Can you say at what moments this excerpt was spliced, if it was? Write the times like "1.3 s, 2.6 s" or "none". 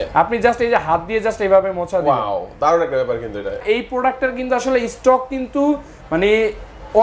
3.6 s